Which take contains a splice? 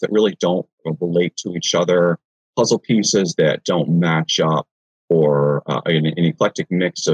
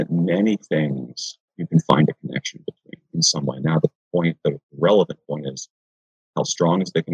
first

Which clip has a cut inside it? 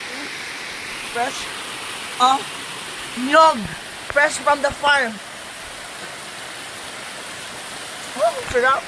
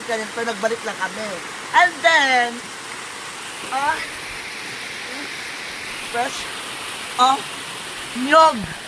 first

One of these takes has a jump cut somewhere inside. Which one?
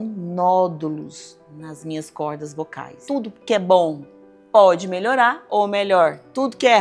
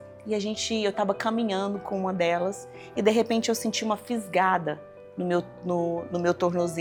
first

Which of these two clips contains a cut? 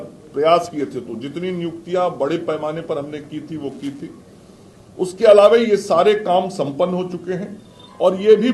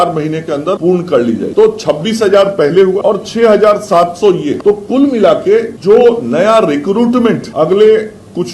second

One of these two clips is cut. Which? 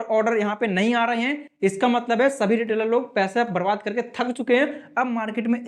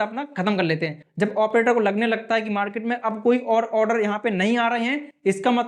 second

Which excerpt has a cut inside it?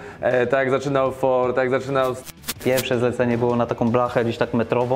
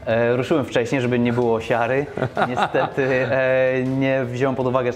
first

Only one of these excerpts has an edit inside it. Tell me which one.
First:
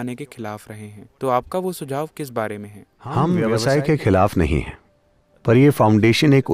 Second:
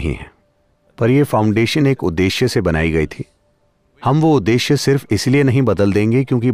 first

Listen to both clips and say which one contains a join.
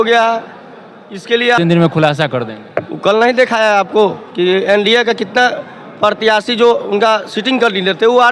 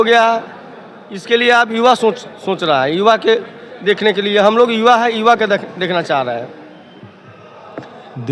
first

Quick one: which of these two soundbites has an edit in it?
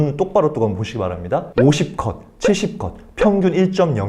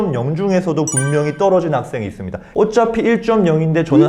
second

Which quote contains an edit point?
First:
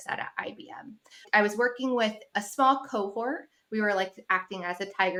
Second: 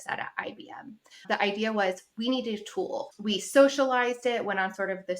second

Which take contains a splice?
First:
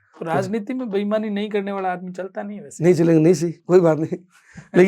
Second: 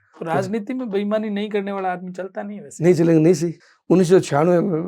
second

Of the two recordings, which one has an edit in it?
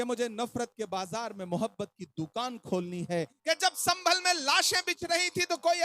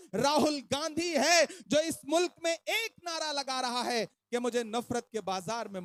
first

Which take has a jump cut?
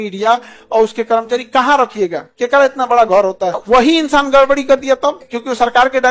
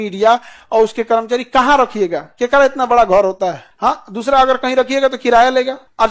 first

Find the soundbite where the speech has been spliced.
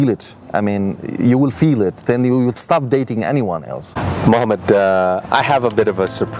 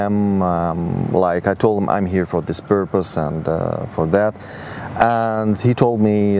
first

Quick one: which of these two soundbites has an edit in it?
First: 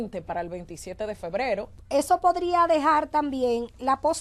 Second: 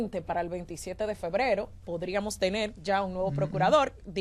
first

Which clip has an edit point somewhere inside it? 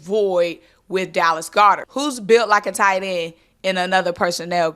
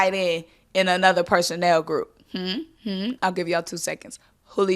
first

